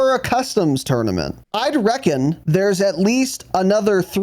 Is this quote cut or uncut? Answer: cut